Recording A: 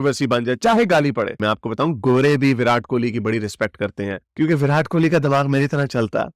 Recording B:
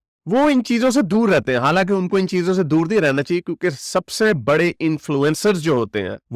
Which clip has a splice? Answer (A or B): A